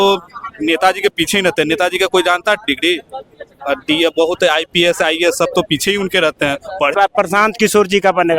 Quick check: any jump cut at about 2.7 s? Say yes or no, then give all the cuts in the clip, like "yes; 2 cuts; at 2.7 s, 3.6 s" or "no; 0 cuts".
no; 1 cut; at 6.9 s